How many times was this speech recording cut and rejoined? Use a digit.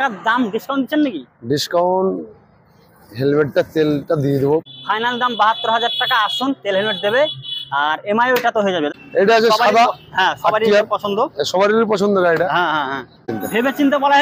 3